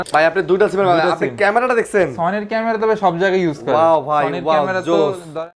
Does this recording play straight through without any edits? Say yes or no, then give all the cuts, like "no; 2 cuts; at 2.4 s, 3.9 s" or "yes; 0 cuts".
yes; 0 cuts